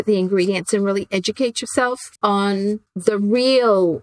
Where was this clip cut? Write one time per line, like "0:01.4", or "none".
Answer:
0:02.1
0:02.9